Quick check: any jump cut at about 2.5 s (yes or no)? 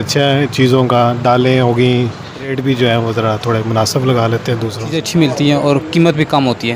yes